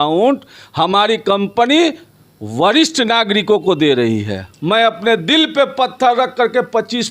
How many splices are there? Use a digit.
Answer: 1